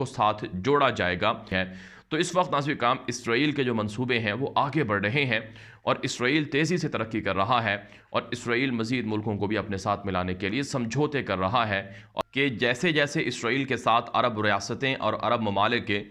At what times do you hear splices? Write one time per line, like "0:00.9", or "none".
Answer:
0:01.4
0:12.1